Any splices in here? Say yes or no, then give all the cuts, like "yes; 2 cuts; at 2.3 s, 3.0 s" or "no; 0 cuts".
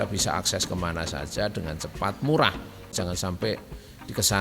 yes; 1 cut; at 2.9 s